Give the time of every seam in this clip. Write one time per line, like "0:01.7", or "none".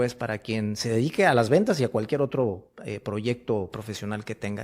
none